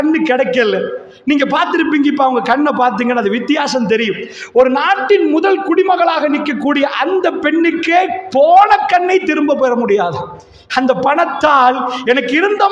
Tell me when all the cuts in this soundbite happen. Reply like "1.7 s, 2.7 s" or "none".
none

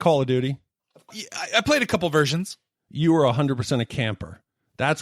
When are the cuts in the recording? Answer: 1.2 s

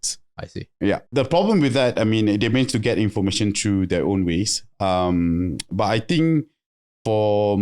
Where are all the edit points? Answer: 1.1 s

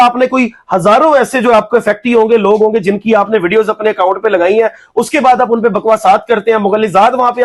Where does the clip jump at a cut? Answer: none

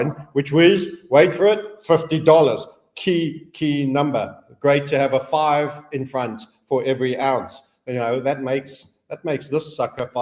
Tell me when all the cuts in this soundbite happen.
none

